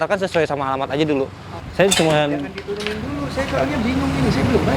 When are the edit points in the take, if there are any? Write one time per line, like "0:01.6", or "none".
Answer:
0:01.6

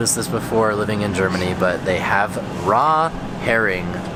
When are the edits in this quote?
none

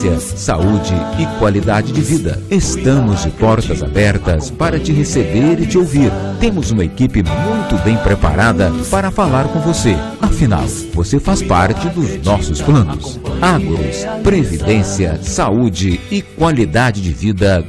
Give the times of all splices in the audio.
none

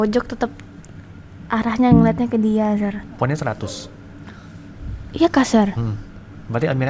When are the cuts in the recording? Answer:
0:03.1

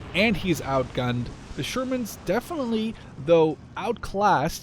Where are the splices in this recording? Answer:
0:01.5

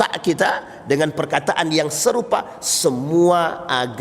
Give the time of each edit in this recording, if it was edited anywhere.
none

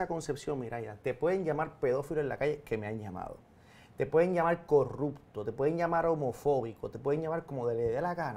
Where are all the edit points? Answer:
none

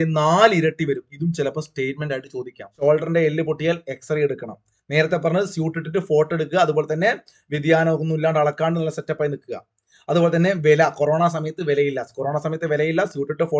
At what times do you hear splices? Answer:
0:02.8

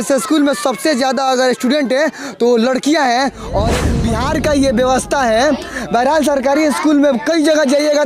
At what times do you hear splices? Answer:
0:03.8

